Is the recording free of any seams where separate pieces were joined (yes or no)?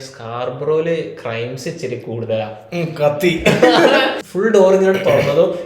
no